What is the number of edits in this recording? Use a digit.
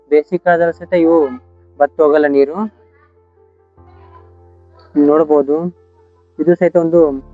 2